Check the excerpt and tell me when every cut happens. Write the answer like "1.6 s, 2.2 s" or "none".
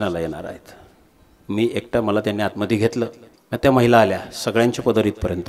3.3 s